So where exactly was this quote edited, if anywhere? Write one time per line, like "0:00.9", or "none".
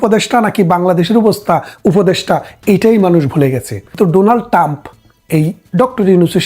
0:03.9